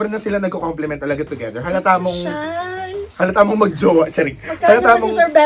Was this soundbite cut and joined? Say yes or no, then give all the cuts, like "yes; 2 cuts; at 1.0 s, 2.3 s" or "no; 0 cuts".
no; 0 cuts